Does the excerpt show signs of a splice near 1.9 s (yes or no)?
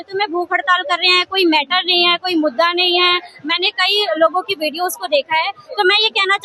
no